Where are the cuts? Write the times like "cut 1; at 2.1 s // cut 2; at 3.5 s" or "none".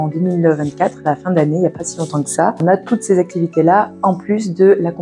cut 1; at 2.6 s